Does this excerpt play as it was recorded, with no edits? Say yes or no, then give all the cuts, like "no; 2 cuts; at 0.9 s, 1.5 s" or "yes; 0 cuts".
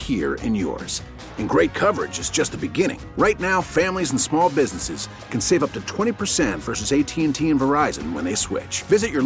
yes; 0 cuts